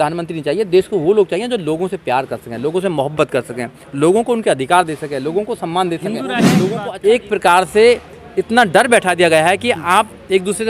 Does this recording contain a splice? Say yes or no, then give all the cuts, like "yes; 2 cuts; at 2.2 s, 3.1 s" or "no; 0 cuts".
yes; 1 cut; at 6.6 s